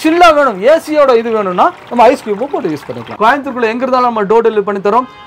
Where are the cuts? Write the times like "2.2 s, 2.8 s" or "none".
3.0 s